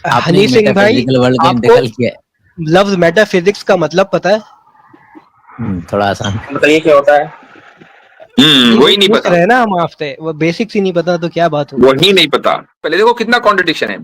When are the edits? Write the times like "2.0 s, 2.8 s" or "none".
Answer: 12.8 s